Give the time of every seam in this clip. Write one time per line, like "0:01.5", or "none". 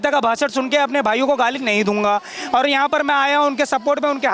none